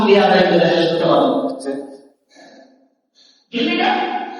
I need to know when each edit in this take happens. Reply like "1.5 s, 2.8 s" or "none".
2.5 s